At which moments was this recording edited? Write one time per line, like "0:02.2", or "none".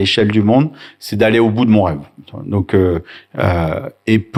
none